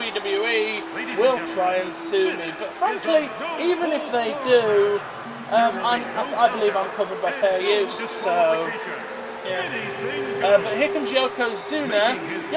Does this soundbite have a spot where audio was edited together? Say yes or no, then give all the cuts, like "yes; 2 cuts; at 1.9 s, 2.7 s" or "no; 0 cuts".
yes; 1 cut; at 2.9 s